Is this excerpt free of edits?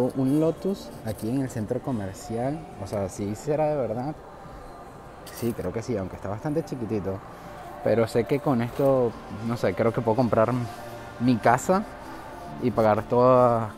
yes; 0 cuts

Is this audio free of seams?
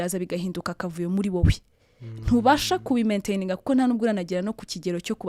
yes; 0 cuts

